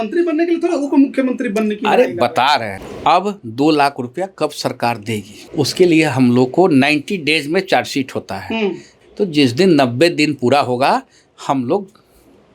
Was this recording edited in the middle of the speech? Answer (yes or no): yes